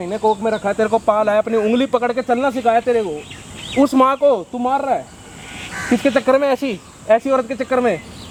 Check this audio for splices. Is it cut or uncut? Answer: uncut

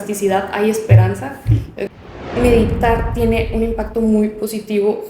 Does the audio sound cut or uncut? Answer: cut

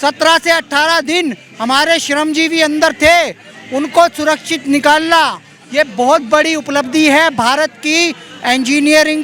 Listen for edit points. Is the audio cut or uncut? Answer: uncut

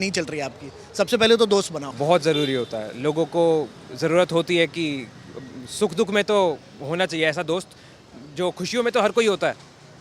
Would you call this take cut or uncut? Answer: uncut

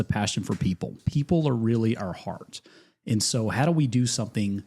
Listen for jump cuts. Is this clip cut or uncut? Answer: cut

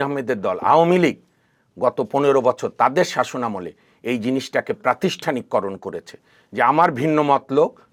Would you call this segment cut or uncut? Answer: uncut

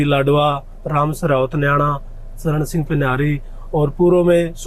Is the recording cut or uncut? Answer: uncut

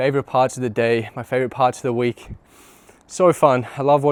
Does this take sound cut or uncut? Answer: uncut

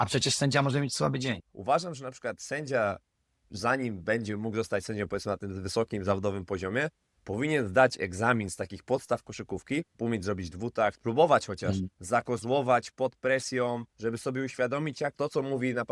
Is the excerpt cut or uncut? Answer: cut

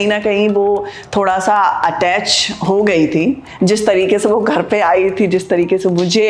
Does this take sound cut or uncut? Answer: uncut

